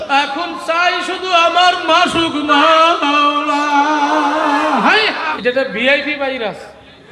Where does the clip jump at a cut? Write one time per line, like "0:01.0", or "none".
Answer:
0:05.3